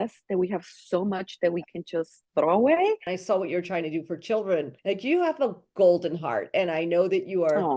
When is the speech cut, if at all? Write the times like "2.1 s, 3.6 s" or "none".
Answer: 3.1 s